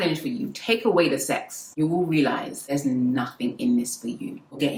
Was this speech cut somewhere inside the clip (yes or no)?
no